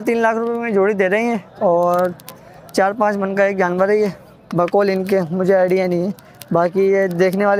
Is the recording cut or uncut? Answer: uncut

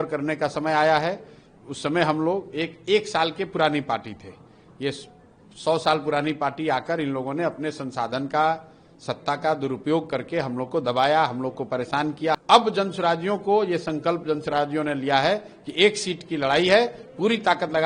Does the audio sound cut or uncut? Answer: cut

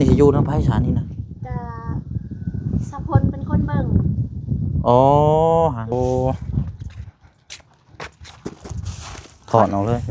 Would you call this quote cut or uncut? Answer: cut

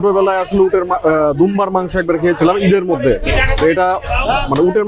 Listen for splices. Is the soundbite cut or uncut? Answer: uncut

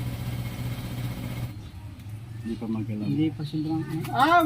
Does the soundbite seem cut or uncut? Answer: cut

